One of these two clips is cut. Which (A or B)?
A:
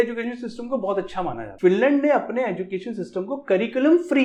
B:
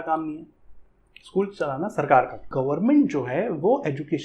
B